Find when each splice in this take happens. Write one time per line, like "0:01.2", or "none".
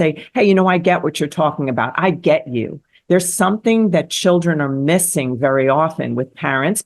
none